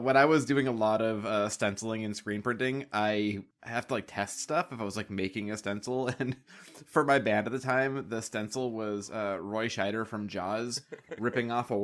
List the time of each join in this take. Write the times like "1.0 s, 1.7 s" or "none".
3.5 s